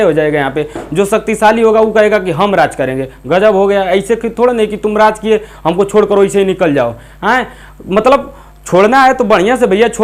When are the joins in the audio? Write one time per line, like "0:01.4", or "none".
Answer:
none